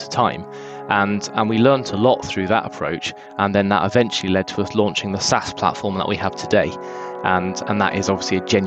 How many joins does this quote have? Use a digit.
0